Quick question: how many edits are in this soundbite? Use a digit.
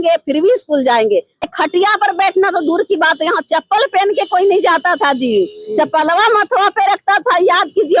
1